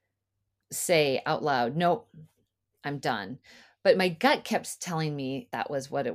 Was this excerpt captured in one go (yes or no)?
yes